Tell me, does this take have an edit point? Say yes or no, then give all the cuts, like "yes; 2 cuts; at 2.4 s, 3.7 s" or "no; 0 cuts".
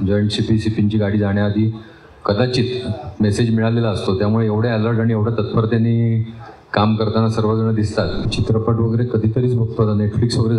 yes; 1 cut; at 8.2 s